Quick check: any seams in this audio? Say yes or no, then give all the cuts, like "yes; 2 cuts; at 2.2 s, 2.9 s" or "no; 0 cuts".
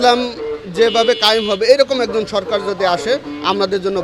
no; 0 cuts